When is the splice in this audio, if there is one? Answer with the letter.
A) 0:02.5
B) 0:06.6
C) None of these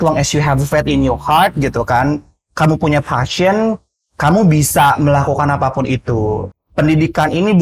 B